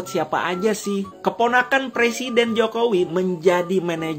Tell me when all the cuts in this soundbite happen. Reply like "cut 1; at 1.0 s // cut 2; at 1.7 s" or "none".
cut 1; at 1.1 s